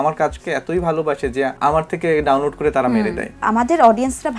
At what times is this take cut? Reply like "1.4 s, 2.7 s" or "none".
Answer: 1.5 s, 3.4 s